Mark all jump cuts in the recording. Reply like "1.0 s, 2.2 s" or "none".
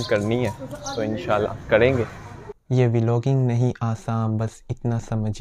2.5 s